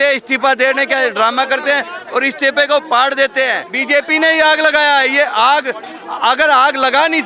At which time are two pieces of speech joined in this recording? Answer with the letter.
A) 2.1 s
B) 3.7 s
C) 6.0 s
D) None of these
B